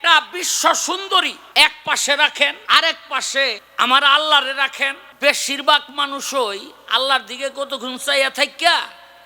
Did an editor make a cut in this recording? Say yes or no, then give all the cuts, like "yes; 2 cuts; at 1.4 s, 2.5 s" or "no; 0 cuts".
yes; 4 cuts; at 1.4 s, 2.6 s, 3.6 s, 5.0 s